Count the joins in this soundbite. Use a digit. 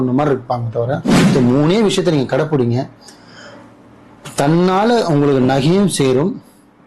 1